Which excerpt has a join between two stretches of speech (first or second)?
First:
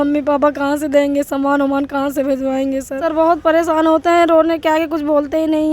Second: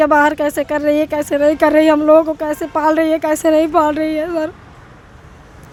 first